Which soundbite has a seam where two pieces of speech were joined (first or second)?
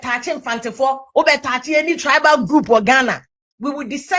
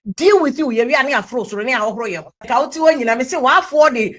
second